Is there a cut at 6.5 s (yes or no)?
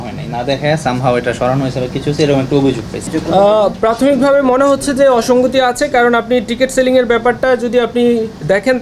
no